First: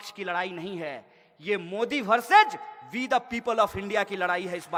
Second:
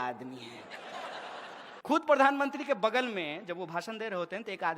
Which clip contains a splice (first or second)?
second